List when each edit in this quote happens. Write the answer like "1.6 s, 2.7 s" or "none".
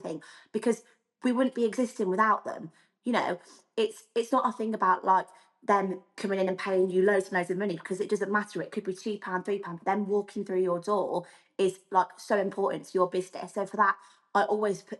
none